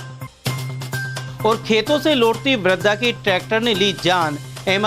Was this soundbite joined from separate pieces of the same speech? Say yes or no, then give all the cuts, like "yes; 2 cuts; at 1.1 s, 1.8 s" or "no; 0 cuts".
no; 0 cuts